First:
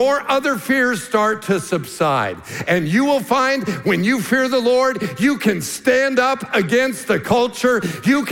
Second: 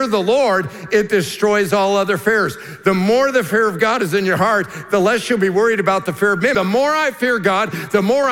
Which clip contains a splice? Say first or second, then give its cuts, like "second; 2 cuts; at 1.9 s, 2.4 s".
second; 1 cut; at 6.5 s